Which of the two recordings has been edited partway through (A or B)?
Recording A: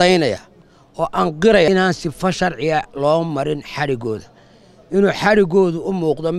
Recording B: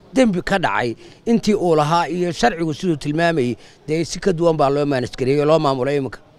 A